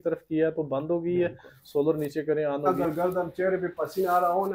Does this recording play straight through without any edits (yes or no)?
no